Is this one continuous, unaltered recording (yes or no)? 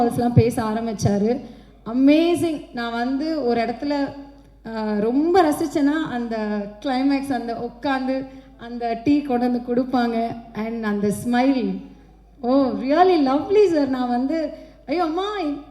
yes